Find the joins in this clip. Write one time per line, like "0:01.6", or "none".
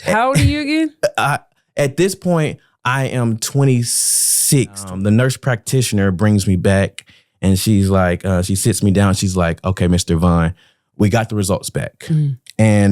0:04.9